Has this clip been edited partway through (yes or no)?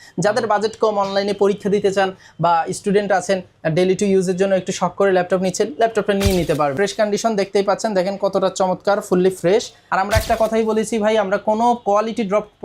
yes